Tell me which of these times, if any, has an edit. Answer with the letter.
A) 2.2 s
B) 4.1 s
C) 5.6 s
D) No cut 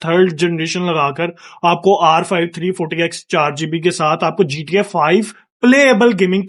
D